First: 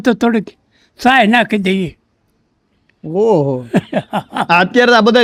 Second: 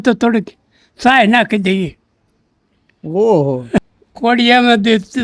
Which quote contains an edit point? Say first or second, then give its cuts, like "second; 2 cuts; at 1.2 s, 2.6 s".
second; 1 cut; at 4.0 s